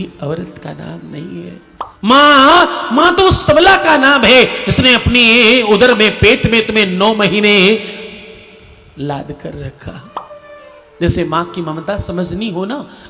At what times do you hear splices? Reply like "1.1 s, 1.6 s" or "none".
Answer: 1.9 s